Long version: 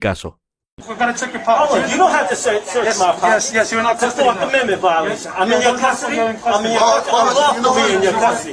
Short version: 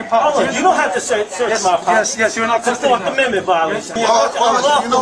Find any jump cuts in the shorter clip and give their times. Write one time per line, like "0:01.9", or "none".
0:03.9